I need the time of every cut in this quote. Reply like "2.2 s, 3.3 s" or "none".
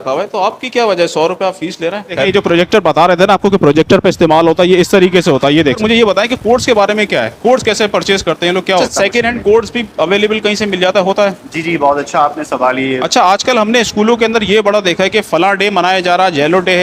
2.2 s, 5.8 s, 8.8 s, 13.0 s